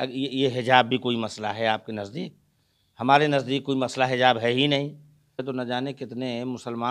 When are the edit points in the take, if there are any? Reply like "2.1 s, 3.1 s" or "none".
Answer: 5.4 s